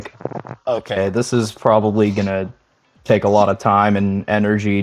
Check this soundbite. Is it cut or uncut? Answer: uncut